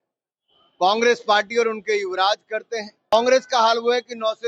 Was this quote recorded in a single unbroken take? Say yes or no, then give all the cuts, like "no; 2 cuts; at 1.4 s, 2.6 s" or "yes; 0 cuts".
no; 1 cut; at 3.1 s